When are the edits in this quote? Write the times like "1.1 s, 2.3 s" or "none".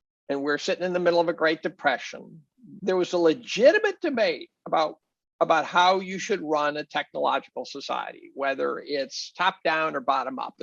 2.7 s